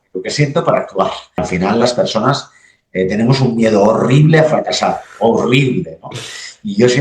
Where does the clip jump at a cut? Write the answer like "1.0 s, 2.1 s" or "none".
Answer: 1.3 s